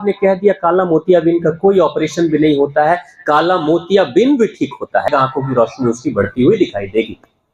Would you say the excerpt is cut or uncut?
cut